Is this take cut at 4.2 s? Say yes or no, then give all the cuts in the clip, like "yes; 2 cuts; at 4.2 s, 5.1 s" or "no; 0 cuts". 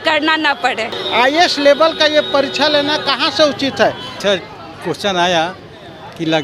yes; 2 cuts; at 1.0 s, 4.2 s